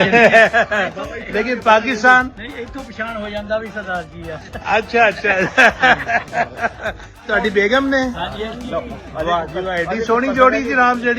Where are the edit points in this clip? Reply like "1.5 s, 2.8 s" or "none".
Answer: 7.3 s